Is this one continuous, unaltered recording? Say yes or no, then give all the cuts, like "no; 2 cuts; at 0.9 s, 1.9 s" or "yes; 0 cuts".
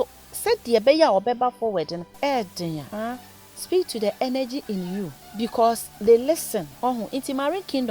no; 4 cuts; at 2.0 s, 2.9 s, 5.2 s, 6.7 s